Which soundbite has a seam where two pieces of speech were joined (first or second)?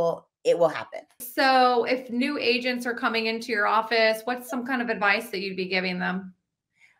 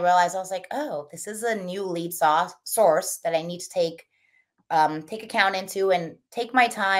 first